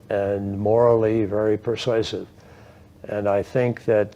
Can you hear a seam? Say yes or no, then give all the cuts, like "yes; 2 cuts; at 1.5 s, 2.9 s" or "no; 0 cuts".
yes; 1 cut; at 2.5 s